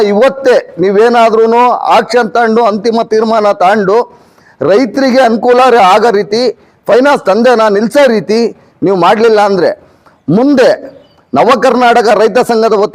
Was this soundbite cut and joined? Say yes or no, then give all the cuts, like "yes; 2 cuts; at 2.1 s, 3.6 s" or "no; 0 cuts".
no; 0 cuts